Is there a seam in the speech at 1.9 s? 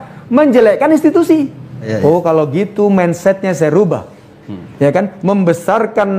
yes; 1 cut; at 1.9 s

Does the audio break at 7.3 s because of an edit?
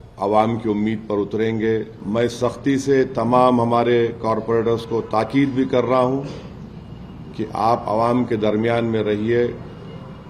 no; 1 cut; at 2.0 s

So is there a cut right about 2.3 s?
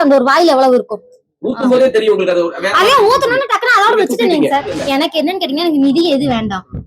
no; 1 cut; at 4.8 s

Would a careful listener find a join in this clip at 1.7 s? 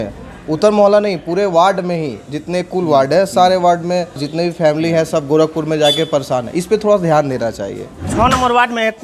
no; 2 cuts; at 4.3 s, 8.0 s

